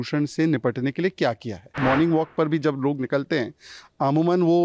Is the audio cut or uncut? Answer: cut